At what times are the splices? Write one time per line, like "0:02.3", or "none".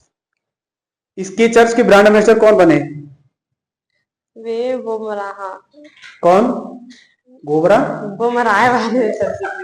none